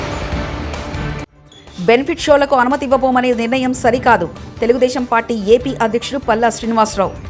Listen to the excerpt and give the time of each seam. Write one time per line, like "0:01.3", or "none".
none